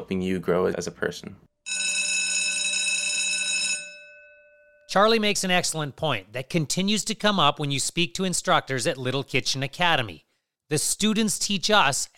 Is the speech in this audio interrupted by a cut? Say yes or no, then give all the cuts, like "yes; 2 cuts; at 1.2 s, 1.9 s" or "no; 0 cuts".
no; 0 cuts